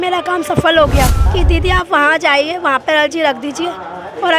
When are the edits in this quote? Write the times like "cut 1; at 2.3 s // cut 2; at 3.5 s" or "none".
cut 1; at 1.2 s